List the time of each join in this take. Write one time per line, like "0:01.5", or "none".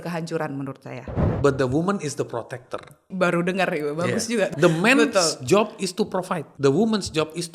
0:01.2
0:03.0
0:04.5
0:06.5